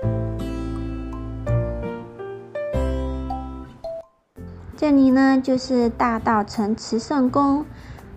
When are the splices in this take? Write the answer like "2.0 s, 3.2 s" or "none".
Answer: none